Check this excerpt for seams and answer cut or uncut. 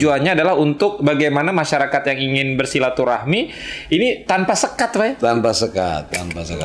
uncut